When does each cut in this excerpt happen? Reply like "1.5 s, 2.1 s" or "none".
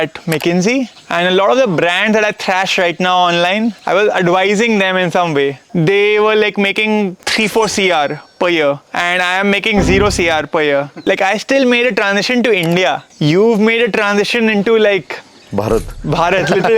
1.0 s, 3.8 s, 5.6 s, 7.2 s, 8.9 s, 11.0 s, 13.1 s